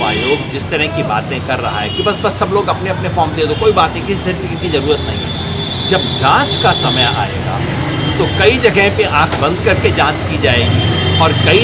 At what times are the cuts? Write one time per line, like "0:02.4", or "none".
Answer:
none